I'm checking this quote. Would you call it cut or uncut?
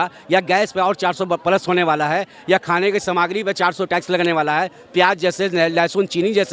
uncut